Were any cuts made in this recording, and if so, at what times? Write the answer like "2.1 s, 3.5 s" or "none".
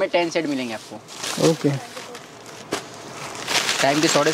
none